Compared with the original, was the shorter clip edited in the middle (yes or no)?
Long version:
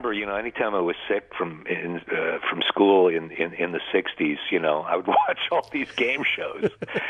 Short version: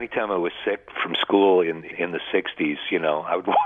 yes